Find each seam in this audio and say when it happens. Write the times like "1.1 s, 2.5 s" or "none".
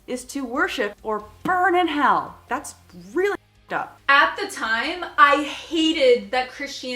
0.9 s, 2.4 s, 3.9 s